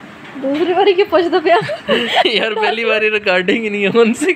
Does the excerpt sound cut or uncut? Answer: uncut